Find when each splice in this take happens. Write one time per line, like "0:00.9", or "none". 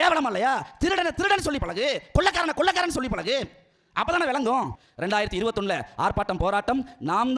0:04.8